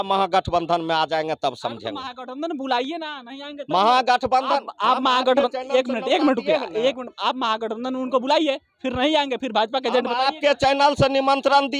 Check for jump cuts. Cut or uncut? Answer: uncut